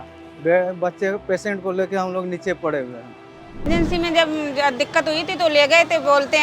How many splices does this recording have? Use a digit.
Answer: 1